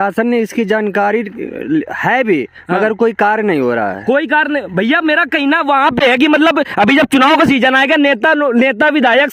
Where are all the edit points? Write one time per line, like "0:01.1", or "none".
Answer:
none